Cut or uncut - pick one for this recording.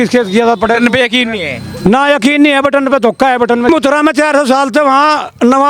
cut